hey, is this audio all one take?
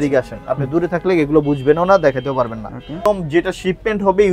no; 1 cut; at 3.1 s

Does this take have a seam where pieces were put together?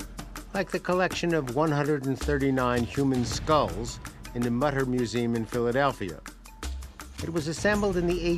no; 0 cuts

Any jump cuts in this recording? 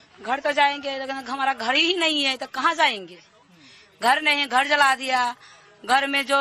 yes; 1 cut; at 2.0 s

